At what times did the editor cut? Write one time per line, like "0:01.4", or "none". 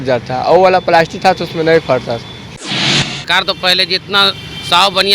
0:02.8

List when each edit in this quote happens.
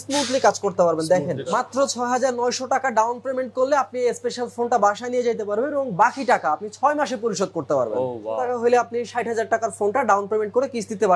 0:01.4
0:08.4

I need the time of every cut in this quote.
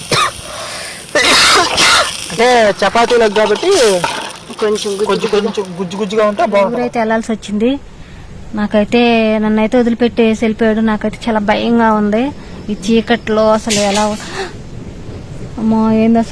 0:06.8

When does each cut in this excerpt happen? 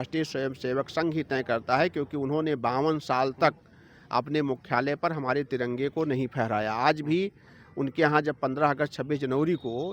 none

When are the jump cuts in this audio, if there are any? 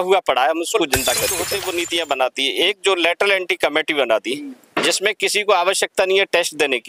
0:01.6

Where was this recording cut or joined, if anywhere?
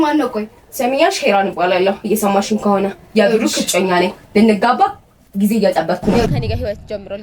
0:06.3

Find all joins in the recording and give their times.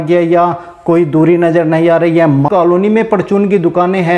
0:02.5

